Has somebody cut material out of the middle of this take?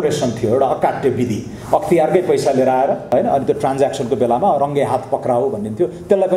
yes; 1 cut; at 3.0 s

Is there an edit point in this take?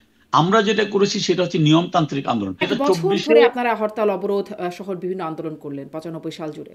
yes; 1 cut; at 2.6 s

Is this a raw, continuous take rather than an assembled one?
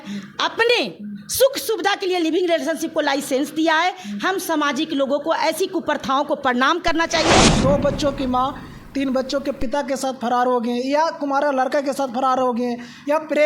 no; 1 cut; at 7.5 s

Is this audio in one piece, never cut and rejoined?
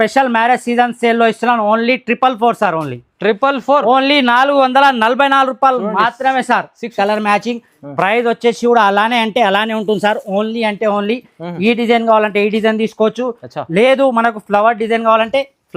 no; 1 cut; at 6.9 s

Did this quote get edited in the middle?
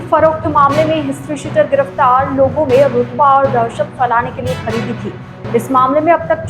no; 0 cuts

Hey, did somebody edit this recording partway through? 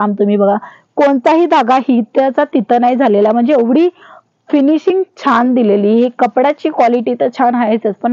no; 0 cuts

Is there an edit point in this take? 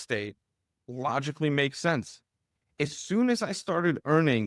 no; 0 cuts

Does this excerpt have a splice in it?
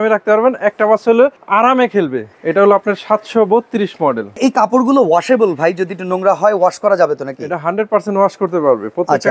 yes; 3 cuts; at 1.4 s, 2.3 s, 4.4 s

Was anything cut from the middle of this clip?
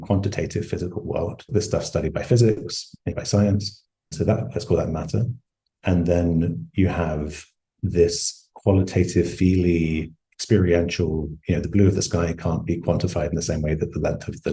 yes; 3 cuts; at 1.5 s, 3.1 s, 4.1 s

